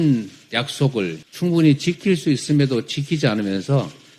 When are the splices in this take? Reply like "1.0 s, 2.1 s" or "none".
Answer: 1.2 s